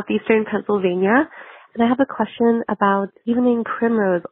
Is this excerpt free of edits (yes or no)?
no